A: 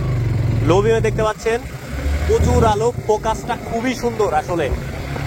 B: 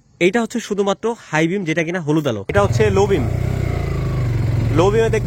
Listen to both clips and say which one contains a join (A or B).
B